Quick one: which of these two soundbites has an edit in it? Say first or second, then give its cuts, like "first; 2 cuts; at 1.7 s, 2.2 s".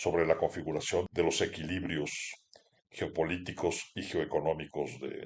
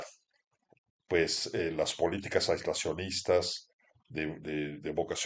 first; 1 cut; at 1.1 s